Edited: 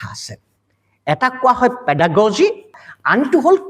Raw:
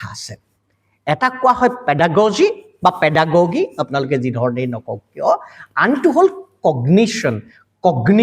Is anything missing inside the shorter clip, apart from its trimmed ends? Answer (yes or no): yes